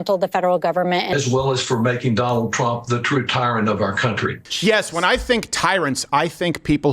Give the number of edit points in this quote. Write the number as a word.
one